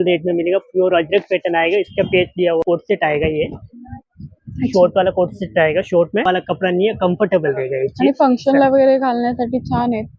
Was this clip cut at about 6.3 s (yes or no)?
yes